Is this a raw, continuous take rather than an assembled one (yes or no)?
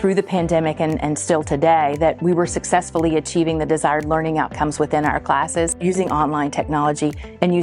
no